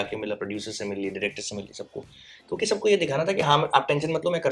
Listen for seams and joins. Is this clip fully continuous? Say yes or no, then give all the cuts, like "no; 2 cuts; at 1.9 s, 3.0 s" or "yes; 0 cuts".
yes; 0 cuts